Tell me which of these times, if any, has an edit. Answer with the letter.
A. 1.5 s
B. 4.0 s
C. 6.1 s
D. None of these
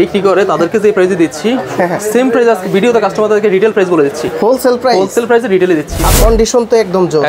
C